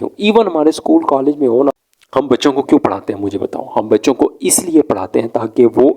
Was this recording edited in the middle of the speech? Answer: yes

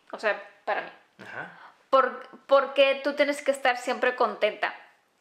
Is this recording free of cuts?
yes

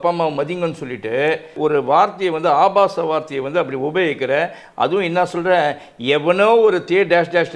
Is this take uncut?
no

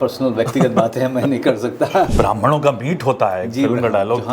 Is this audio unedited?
no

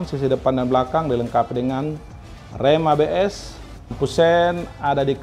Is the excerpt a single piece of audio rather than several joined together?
no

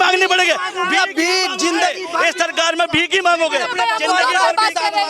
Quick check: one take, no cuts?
yes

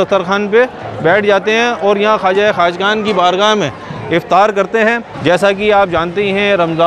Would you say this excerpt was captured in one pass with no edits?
no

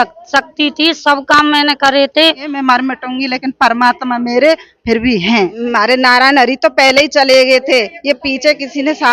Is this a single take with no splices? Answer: no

